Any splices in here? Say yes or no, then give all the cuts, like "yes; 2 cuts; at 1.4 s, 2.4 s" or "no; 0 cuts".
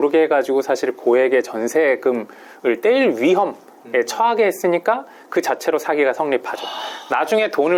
no; 0 cuts